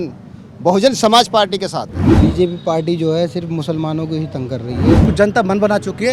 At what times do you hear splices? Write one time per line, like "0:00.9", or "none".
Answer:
0:02.1
0:05.0